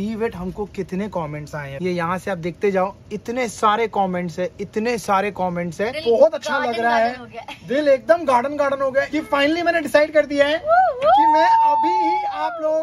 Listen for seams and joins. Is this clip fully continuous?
no; 3 cuts; at 1.6 s, 6.0 s, 9.2 s

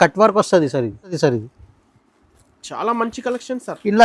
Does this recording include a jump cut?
yes; 1 cut; at 1.1 s

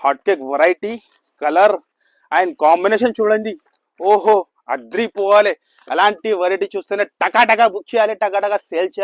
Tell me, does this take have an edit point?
no; 0 cuts

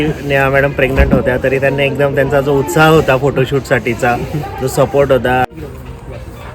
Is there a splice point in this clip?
yes; 1 cut; at 5.5 s

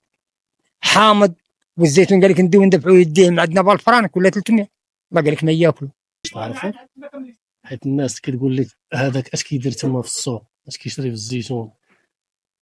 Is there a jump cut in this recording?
yes; 1 cut; at 6.3 s

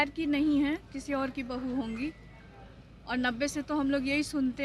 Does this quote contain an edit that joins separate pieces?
no; 0 cuts

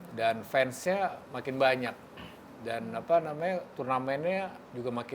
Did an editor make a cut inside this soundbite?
no; 0 cuts

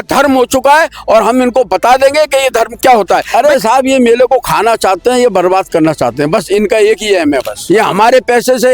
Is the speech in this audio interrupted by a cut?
yes; 2 cuts; at 3.3 s, 7.5 s

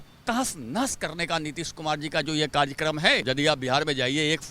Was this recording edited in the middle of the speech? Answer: yes; 1 cut; at 3.2 s

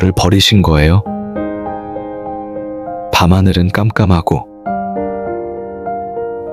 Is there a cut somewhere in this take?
no; 0 cuts

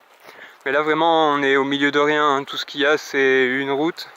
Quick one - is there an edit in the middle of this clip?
yes; 1 cut; at 2.6 s

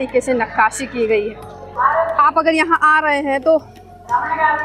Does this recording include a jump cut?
yes; 1 cut; at 1.7 s

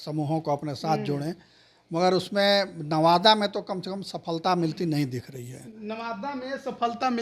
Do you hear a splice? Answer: no; 0 cuts

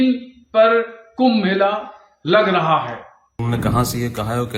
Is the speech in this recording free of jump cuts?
no; 1 cut; at 3.1 s

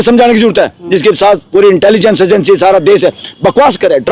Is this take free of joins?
yes; 0 cuts

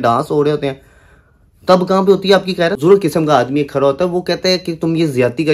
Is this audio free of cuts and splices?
no; 1 cut; at 2.8 s

